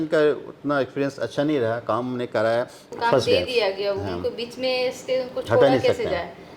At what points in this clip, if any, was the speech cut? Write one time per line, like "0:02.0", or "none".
0:02.9